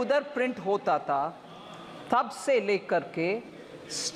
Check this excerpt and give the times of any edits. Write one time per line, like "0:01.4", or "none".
none